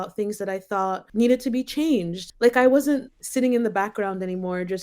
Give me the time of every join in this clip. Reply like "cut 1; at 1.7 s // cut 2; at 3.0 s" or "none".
cut 1; at 1.0 s // cut 2; at 2.2 s // cut 3; at 3.2 s